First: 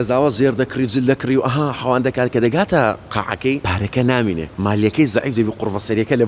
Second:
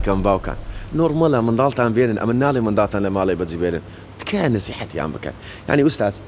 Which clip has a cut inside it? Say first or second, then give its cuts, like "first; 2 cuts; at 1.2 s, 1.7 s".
first; 2 cuts; at 3.6 s, 4.5 s